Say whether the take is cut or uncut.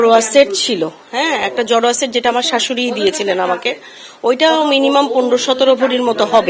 uncut